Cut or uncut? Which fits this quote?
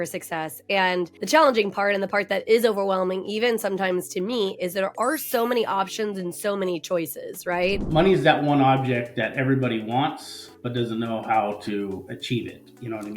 cut